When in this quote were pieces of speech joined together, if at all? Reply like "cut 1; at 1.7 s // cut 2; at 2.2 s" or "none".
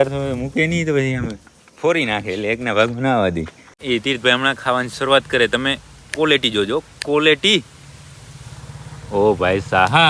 cut 1; at 3.8 s